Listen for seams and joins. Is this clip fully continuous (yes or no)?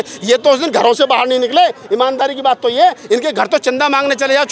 yes